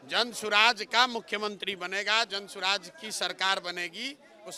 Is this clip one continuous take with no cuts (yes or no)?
yes